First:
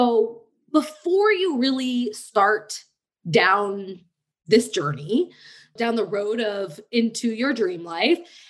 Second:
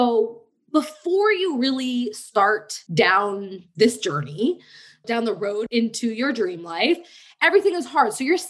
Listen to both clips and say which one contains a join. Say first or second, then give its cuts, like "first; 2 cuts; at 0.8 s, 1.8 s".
second; 2 cuts; at 3.2 s, 5.6 s